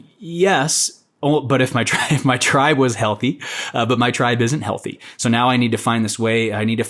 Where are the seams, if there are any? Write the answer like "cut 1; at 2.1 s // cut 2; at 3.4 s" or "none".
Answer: none